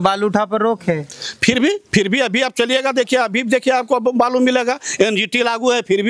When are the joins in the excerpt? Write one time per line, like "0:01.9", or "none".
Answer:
none